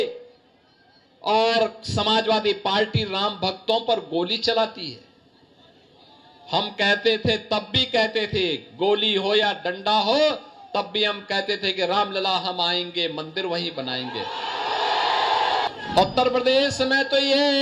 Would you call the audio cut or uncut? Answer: cut